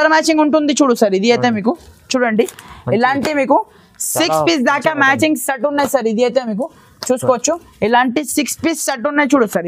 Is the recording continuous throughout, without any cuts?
yes; 0 cuts

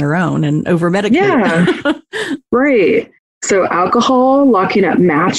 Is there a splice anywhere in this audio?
no; 0 cuts

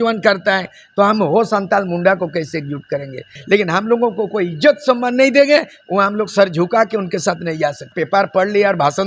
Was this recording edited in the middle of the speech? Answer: yes; 2 cuts; at 3.4 s, 7.9 s

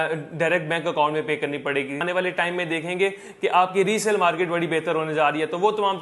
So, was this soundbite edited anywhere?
yes; 1 cut; at 2.0 s

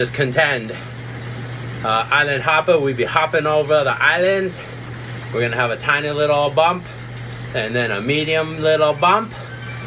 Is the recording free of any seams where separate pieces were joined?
yes; 0 cuts

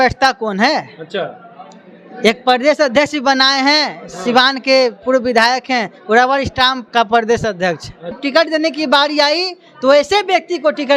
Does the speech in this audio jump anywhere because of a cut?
yes; 1 cut; at 8.2 s

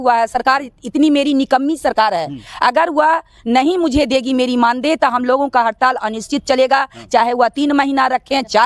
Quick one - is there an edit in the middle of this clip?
no; 0 cuts

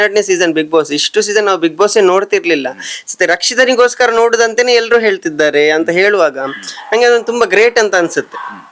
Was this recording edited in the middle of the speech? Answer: no; 0 cuts

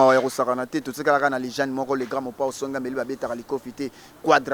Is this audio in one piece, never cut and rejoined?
yes; 0 cuts

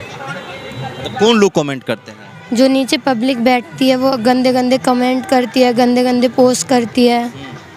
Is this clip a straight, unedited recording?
yes; 0 cuts

